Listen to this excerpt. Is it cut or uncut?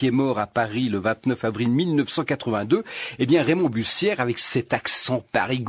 uncut